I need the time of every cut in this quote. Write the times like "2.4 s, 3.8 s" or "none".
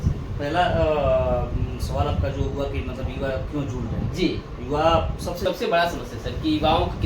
5.4 s